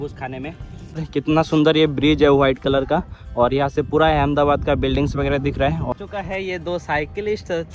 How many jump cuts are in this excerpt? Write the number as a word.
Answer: two